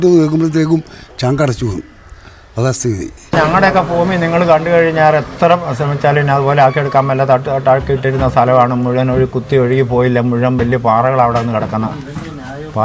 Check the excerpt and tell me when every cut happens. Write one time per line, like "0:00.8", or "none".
0:03.3